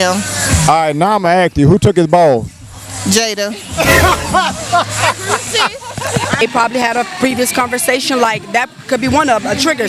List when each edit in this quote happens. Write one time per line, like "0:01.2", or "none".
0:06.4